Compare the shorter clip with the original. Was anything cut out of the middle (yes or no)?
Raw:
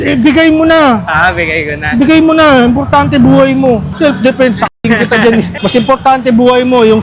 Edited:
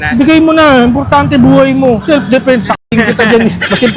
yes